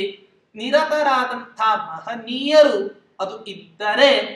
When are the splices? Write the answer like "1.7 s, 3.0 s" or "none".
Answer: none